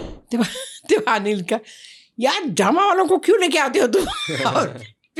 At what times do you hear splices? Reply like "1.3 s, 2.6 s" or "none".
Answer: none